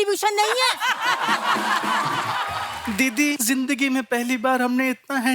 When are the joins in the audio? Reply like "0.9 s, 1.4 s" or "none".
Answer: 2.5 s, 3.4 s